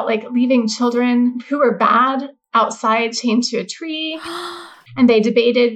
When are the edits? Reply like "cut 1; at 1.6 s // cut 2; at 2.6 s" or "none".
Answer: cut 1; at 1.4 s // cut 2; at 2.4 s // cut 3; at 4.5 s